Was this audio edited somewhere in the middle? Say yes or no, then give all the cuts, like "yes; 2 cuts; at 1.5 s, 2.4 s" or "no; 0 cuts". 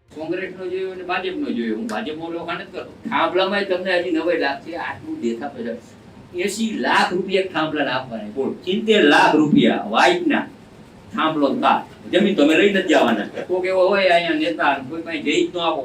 yes; 3 cuts; at 3.0 s, 8.6 s, 13.3 s